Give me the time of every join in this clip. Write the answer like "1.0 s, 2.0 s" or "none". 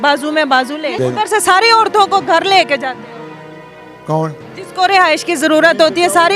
0.9 s

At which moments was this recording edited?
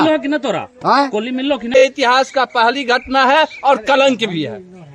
1.8 s

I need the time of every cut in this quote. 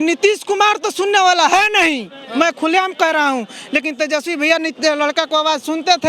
none

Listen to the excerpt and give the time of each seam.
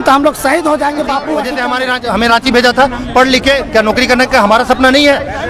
1.5 s

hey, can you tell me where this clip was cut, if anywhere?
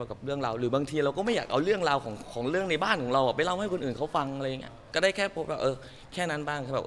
4.8 s

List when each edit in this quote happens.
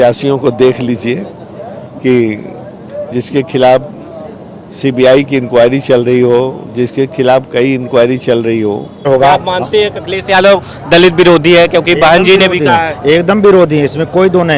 9.1 s

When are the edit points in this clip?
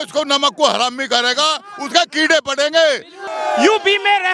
3.2 s

